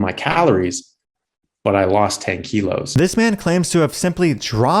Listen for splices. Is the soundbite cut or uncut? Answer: cut